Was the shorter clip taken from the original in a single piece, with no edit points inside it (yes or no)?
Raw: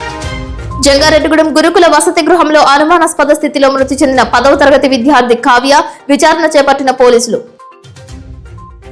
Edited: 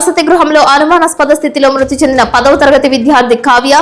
yes